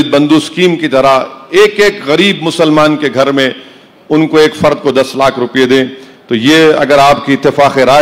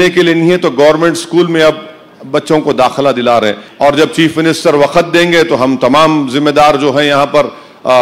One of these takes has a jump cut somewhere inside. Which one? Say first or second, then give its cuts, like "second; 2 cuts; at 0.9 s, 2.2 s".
second; 1 cut; at 3.6 s